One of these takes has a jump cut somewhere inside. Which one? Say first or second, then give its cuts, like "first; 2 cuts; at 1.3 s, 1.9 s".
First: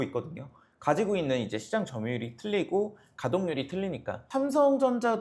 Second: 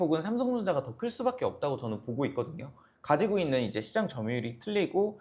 first; 1 cut; at 4.2 s